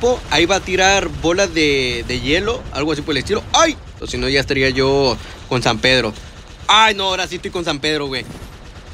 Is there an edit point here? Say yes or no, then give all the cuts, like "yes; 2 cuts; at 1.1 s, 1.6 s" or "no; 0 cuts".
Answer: yes; 1 cut; at 4.0 s